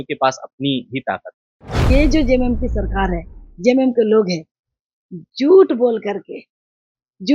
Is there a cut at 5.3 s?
no; 1 cut; at 2.0 s

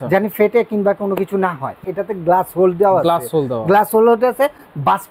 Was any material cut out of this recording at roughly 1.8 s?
yes; 1 cut; at 1.8 s

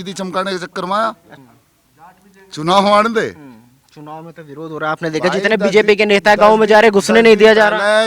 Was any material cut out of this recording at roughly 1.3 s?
yes; 1 cut; at 1.3 s

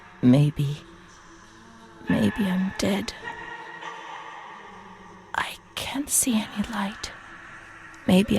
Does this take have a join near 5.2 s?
yes; 2 cuts; at 3.2 s, 5.2 s

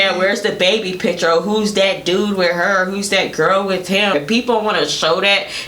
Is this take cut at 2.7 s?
no; 1 cut; at 4.1 s

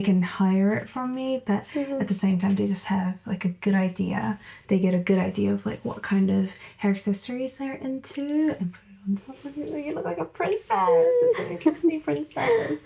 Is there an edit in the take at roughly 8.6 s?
yes; 1 cut; at 8.6 s

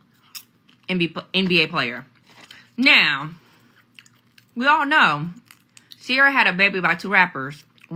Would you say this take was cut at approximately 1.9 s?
no; 0 cuts

